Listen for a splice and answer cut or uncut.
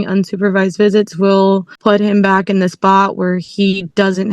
cut